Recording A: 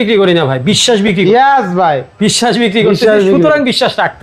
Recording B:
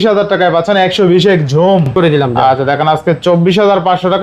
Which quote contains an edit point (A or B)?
B